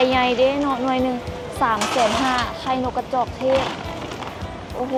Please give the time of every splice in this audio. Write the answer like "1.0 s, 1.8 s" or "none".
none